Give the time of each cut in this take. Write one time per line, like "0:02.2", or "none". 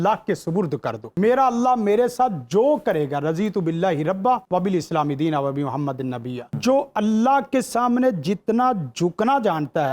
0:01.1
0:04.4
0:06.6